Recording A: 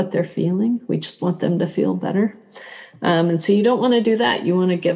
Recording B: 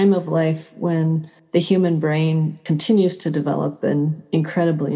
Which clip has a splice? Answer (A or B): B